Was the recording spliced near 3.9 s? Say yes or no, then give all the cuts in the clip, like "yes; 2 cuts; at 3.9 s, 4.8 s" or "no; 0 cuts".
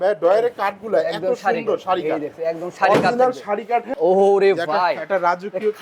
yes; 1 cut; at 3.9 s